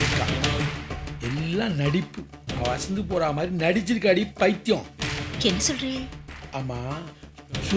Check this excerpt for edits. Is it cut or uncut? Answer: uncut